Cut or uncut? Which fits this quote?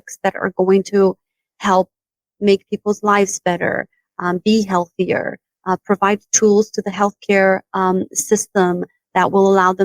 uncut